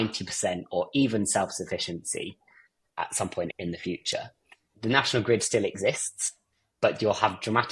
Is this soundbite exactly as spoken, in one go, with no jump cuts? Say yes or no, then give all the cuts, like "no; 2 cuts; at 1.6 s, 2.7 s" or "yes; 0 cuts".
no; 1 cut; at 6.6 s